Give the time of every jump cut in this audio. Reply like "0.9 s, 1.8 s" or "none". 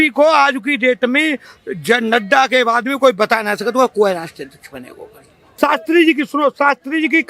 5.4 s

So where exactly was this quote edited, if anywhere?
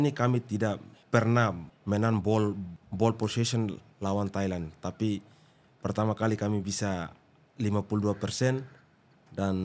0.9 s, 1.7 s, 2.8 s

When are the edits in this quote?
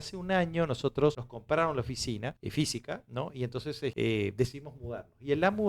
1.3 s, 2.4 s, 3.9 s

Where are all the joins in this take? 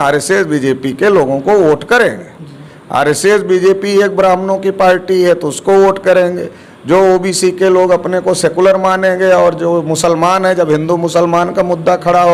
none

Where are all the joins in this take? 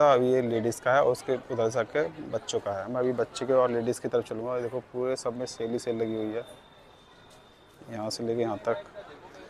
none

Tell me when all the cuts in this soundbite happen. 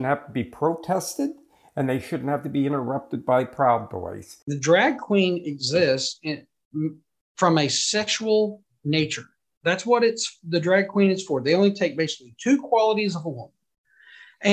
4.3 s

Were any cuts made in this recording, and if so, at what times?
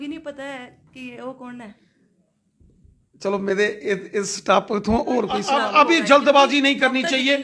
5.4 s

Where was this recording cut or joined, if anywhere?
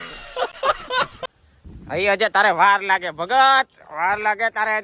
1.2 s

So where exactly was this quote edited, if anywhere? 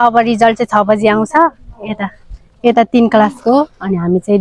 none

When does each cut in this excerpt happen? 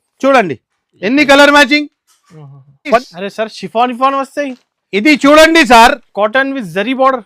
3.0 s

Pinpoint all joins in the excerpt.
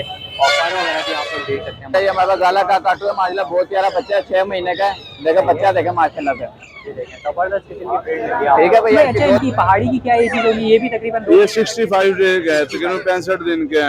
1.9 s, 9.2 s

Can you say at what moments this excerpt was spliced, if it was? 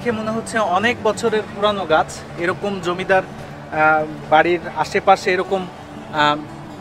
none

